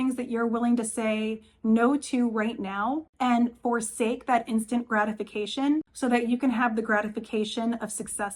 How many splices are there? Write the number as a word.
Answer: two